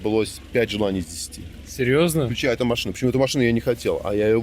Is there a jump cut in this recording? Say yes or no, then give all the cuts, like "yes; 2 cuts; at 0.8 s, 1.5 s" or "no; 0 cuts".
no; 0 cuts